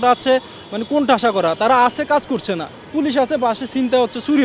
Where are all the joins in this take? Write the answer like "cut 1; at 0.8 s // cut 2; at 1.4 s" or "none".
none